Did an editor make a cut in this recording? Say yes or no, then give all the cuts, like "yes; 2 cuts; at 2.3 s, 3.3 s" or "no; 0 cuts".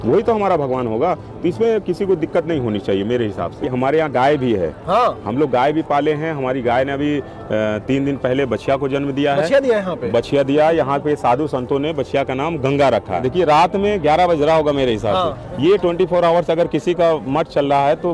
yes; 2 cuts; at 3.6 s, 13.2 s